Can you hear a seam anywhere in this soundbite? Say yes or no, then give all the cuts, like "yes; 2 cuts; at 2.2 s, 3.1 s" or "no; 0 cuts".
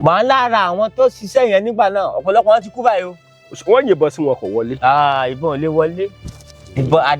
yes; 1 cut; at 1.2 s